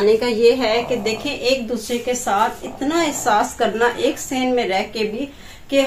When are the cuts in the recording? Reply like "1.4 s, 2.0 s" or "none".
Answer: none